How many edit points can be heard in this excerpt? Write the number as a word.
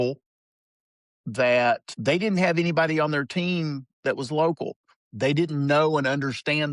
one